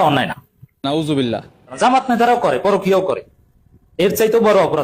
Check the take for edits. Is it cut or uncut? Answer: uncut